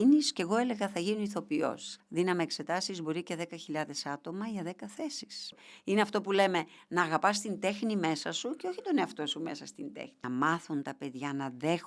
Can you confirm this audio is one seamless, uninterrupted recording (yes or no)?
no